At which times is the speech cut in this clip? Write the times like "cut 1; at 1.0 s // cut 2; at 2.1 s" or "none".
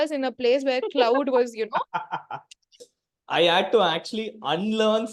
cut 1; at 2.9 s